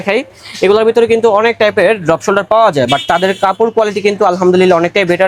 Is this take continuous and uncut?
yes; 0 cuts

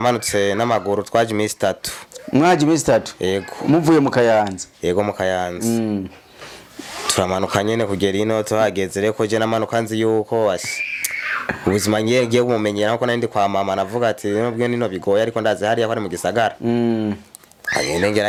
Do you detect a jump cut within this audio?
no; 0 cuts

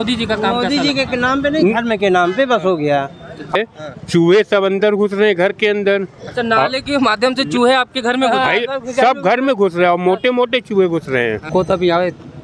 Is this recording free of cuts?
no; 2 cuts; at 3.5 s, 11.5 s

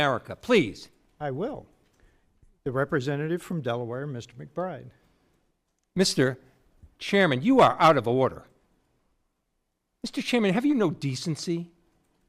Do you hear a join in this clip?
no; 0 cuts

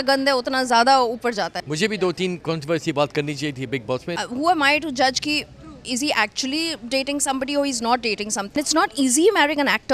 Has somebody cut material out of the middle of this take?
yes; 3 cuts; at 1.6 s, 4.1 s, 8.5 s

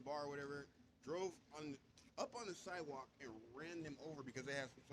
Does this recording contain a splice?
no; 0 cuts

